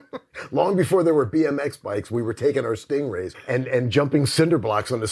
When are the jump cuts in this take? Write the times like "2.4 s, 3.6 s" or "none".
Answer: 3.4 s